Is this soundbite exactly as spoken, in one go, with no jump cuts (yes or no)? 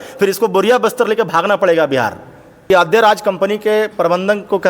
no